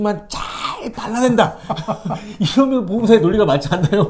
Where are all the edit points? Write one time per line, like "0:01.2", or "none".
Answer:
none